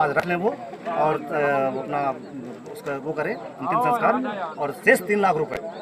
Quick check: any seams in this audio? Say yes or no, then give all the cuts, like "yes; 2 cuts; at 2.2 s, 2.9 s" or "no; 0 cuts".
no; 0 cuts